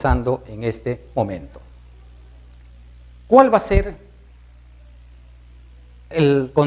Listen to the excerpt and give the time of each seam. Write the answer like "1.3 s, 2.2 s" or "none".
0.9 s